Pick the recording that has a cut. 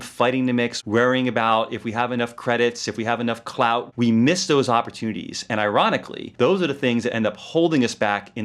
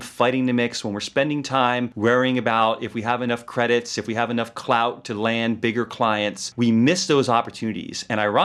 first; 2 cuts; at 0.8 s, 3.9 s

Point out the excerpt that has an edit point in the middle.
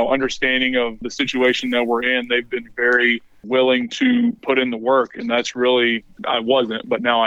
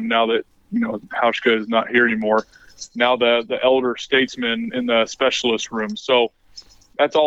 first; 4 cuts; at 1.1 s, 3.4 s, 4.4 s, 6.1 s

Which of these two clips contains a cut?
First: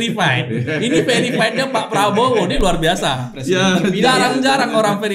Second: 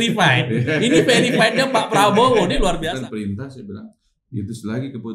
second; 1 cut; at 2.8 s

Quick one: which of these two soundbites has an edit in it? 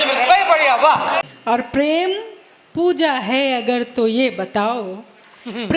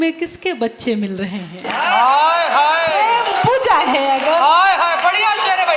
first; 1 cut; at 1.2 s

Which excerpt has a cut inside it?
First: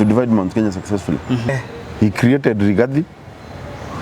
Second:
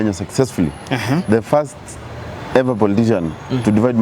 first; 1 cut; at 1.5 s

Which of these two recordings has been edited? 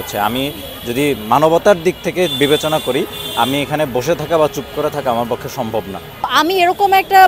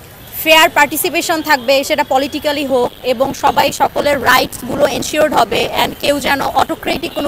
first; 1 cut; at 6.3 s

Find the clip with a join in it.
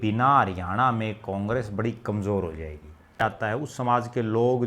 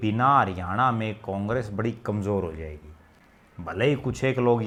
first; 1 cut; at 3.2 s

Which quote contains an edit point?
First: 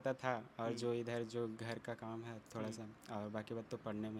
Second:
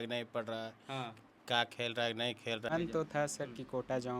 second; 1 cut; at 2.7 s

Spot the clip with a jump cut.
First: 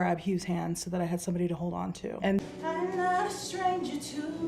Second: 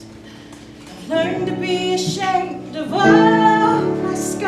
first; 1 cut; at 2.4 s

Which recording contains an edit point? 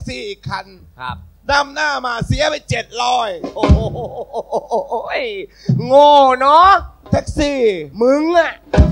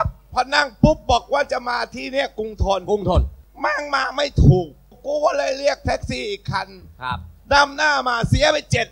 second; 2 cuts; at 3.4 s, 5.0 s

